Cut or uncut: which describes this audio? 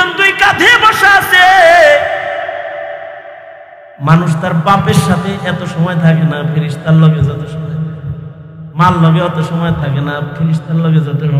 uncut